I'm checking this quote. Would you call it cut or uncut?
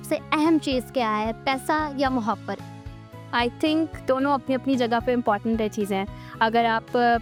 uncut